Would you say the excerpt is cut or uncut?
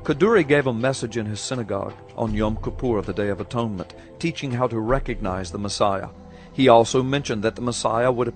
cut